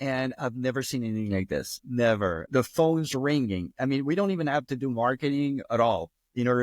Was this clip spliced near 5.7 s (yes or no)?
yes